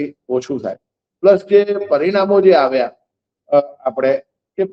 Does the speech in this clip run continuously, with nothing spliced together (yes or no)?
yes